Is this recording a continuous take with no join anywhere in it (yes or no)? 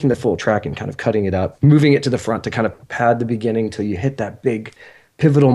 no